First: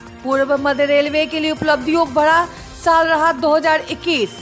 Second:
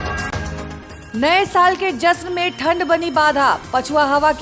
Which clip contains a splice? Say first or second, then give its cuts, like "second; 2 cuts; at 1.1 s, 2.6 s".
second; 1 cut; at 0.9 s